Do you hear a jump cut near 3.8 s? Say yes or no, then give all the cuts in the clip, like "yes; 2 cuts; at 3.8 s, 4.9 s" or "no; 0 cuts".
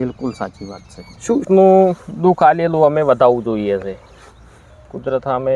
no; 1 cut; at 1.5 s